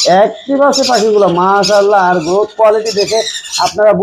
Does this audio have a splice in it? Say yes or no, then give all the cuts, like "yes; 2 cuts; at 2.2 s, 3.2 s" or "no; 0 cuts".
no; 0 cuts